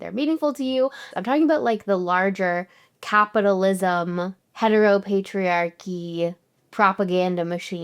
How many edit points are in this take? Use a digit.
1